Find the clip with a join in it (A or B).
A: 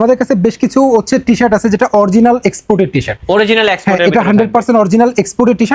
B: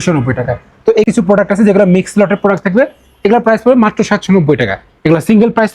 B